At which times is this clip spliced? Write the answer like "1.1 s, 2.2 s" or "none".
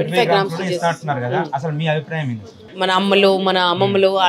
2.7 s